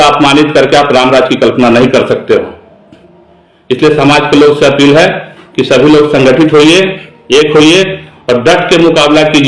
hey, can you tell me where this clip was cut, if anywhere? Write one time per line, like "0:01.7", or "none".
none